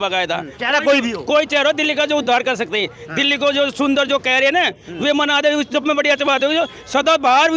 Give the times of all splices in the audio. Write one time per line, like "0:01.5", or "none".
none